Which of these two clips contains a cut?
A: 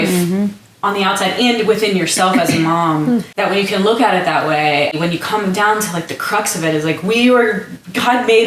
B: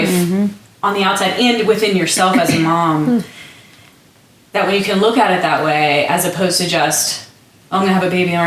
A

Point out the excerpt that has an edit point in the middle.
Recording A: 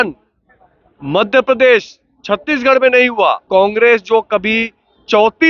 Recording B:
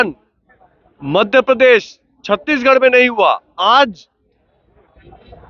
A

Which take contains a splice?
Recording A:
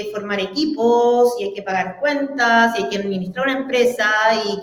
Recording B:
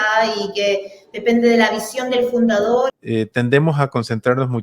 B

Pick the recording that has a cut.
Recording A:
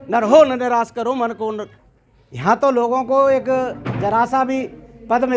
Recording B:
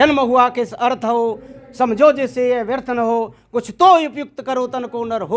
A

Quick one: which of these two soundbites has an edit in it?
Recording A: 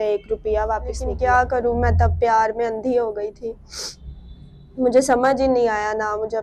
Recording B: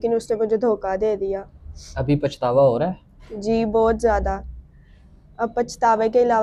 A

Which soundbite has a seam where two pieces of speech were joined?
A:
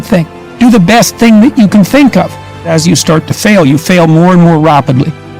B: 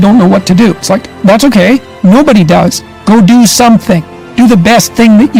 A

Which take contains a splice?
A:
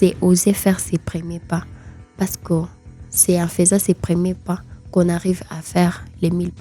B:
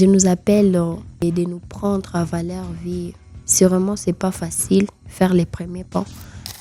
B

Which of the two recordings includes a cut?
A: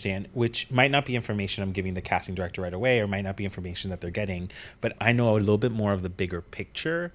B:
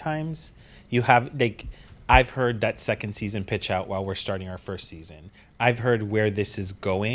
A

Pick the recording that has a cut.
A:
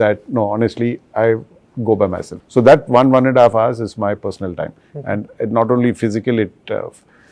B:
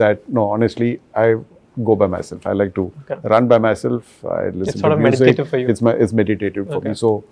A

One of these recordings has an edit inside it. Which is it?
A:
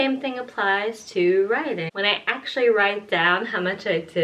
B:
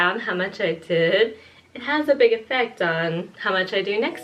A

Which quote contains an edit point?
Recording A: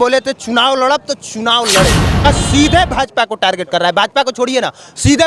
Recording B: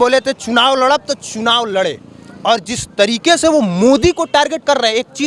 A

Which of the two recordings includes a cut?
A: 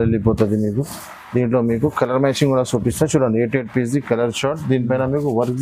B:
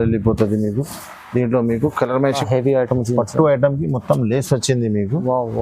B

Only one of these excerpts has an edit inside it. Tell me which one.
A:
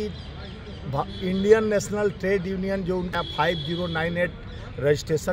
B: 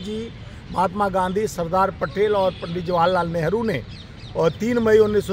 A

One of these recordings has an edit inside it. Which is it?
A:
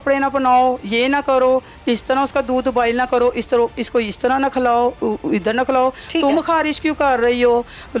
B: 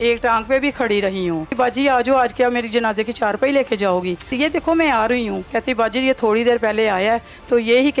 B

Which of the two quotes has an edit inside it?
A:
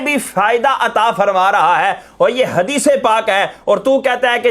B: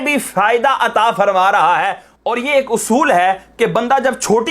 B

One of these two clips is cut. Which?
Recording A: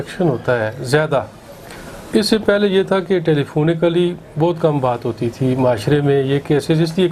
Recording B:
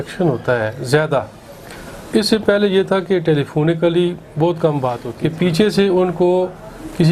B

